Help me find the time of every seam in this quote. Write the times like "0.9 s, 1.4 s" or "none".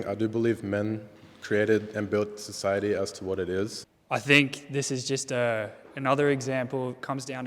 3.9 s